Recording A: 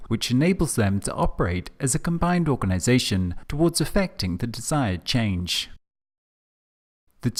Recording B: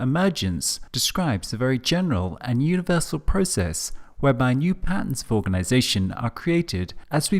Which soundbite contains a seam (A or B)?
B